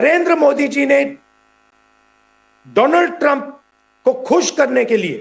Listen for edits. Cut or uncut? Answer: uncut